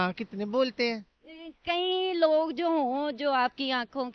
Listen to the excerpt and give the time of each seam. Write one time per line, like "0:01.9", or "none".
none